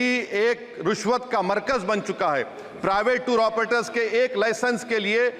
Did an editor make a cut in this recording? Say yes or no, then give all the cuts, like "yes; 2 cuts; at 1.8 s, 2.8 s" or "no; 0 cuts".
no; 0 cuts